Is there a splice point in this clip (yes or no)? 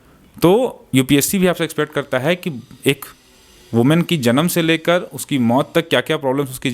no